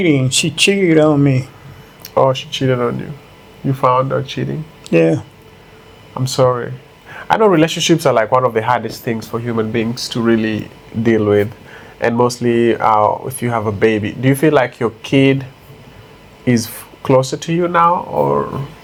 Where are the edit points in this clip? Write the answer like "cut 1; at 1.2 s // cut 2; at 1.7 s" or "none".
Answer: none